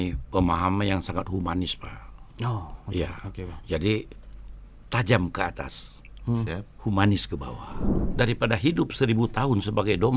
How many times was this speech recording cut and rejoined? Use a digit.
1